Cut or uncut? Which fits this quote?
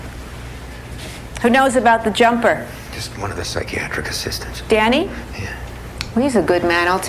cut